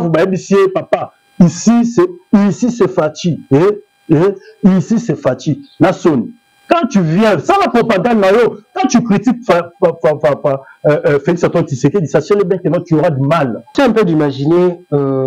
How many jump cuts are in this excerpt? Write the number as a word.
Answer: one